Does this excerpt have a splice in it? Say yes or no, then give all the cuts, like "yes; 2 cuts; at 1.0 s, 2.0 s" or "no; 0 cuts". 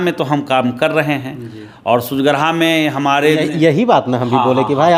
no; 0 cuts